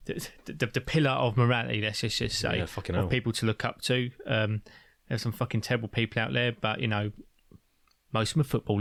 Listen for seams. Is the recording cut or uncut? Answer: uncut